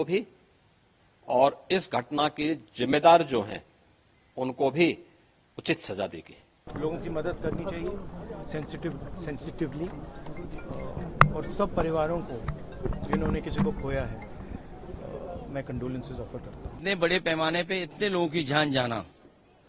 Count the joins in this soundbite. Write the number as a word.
two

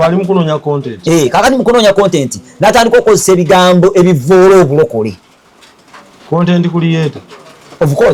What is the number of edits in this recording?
zero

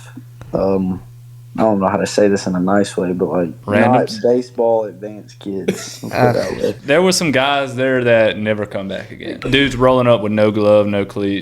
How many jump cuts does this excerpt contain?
three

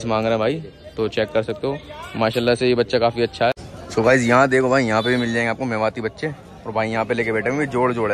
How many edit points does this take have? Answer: one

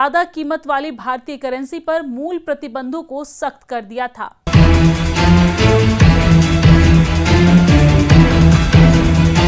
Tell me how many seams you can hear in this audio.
one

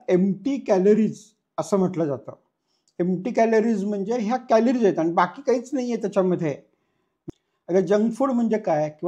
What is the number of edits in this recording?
one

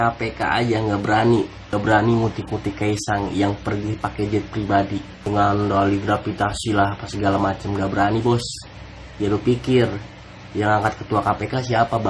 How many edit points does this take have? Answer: zero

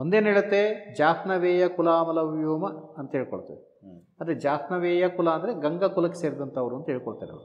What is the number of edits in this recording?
zero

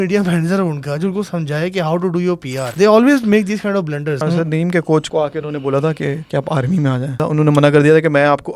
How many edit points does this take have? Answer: five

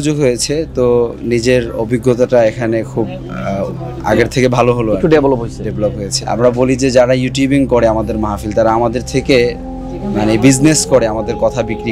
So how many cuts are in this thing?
one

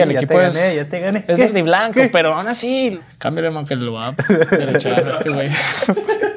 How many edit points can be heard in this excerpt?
one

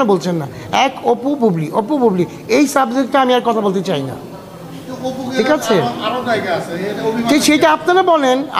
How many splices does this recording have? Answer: zero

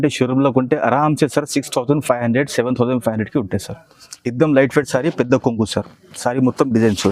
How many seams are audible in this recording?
zero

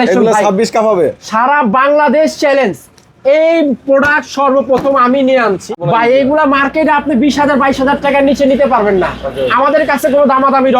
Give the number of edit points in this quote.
one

